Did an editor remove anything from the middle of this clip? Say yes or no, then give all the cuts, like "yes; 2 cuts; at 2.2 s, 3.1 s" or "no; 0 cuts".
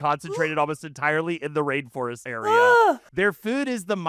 yes; 2 cuts; at 2.2 s, 3.1 s